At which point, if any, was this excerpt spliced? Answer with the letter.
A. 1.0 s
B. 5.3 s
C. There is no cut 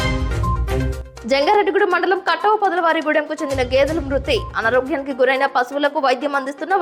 A